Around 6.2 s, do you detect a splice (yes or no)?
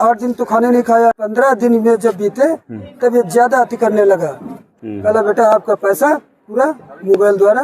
no